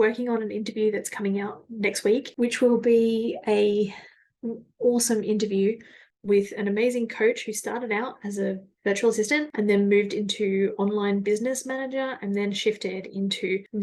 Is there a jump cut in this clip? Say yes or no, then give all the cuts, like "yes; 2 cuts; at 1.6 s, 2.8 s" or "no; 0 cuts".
no; 0 cuts